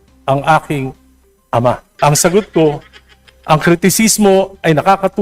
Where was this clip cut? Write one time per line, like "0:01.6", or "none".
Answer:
0:02.0

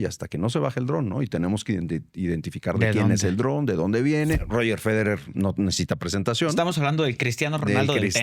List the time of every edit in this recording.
0:04.4

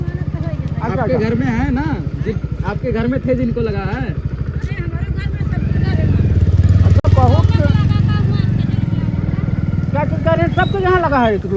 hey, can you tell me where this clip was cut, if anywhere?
none

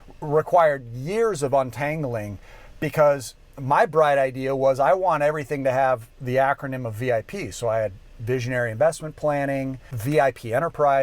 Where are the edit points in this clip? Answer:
0:09.9

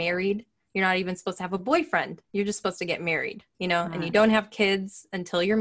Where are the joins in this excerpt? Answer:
0:02.2
0:03.4

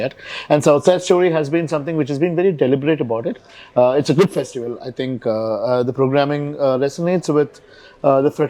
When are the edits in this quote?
none

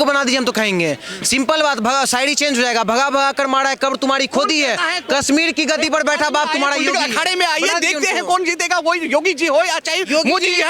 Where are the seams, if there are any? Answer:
none

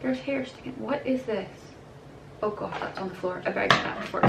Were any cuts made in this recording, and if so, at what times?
0:02.3

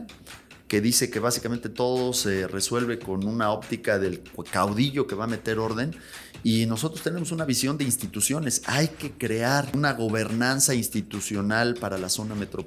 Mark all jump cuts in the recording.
0:09.8

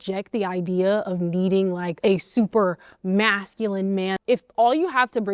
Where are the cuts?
0:01.9
0:04.2

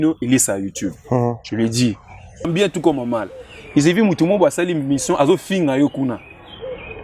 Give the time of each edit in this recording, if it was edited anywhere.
0:02.5

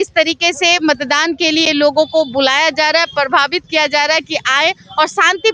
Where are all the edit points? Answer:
none

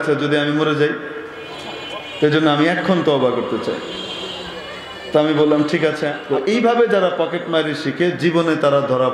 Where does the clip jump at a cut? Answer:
0:06.1

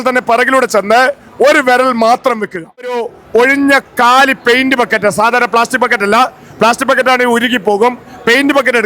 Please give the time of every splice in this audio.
0:03.1

